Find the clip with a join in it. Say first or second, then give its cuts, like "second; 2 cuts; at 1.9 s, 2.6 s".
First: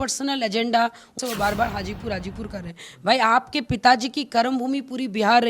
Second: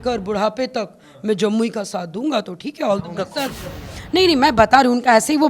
first; 1 cut; at 1.1 s